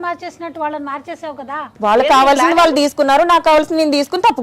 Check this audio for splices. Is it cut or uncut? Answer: cut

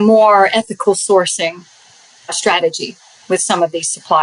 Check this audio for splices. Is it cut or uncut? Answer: cut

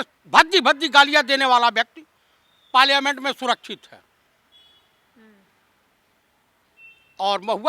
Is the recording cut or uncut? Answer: uncut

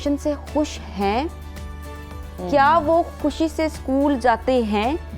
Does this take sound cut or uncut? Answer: uncut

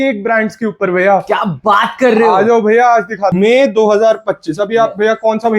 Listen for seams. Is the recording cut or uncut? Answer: cut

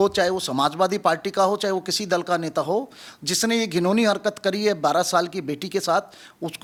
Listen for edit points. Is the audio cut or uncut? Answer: uncut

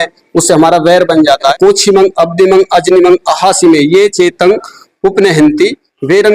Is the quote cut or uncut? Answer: cut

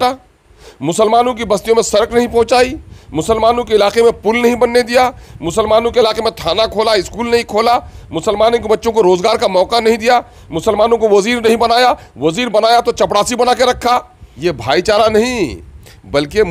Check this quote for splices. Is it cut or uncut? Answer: cut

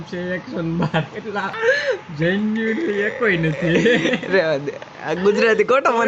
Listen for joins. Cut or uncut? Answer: cut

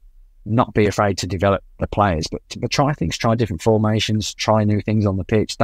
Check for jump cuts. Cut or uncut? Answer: uncut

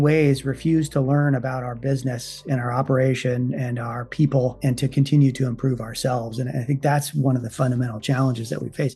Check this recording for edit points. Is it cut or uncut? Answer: uncut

